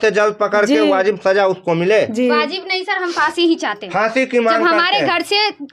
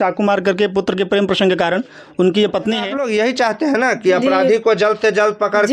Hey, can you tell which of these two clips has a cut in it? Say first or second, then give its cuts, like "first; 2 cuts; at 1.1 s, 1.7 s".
second; 1 cut; at 3.0 s